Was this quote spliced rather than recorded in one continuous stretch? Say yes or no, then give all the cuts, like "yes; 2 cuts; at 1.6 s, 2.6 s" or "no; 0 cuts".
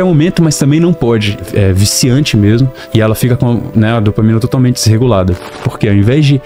yes; 3 cuts; at 1.4 s, 2.8 s, 5.5 s